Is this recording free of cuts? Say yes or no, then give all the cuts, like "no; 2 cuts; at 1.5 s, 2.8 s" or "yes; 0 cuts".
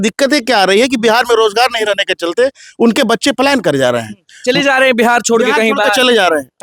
yes; 0 cuts